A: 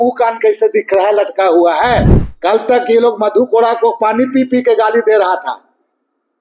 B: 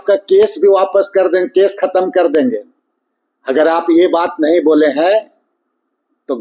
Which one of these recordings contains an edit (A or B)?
A